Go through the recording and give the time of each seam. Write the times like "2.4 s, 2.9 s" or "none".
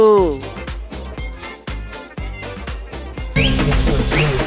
3.2 s